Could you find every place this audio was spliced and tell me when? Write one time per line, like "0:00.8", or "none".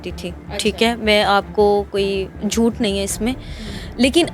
none